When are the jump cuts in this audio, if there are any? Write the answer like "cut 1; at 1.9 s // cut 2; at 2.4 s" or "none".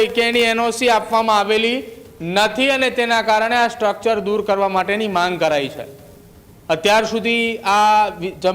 none